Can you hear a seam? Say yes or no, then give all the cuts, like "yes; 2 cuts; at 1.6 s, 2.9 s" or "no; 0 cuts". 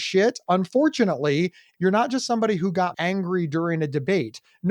yes; 2 cuts; at 1.6 s, 2.9 s